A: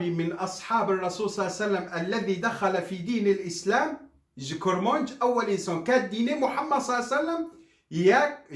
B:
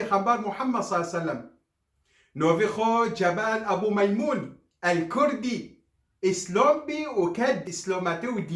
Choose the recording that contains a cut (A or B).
B